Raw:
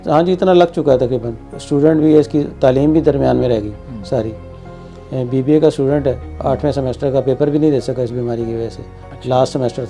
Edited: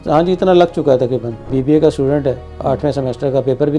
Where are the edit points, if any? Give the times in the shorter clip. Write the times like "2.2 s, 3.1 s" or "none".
1.4 s